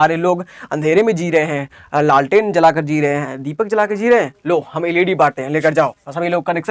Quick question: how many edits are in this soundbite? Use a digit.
0